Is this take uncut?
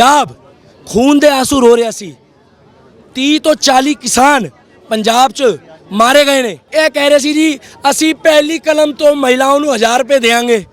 no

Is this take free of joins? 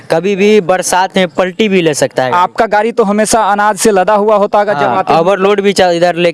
yes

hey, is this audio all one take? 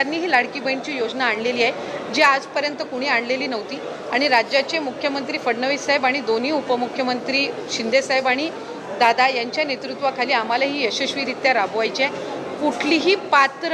yes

